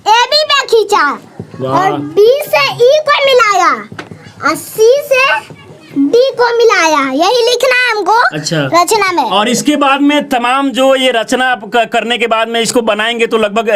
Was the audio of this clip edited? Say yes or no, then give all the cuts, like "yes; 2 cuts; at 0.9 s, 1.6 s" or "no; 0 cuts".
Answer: no; 0 cuts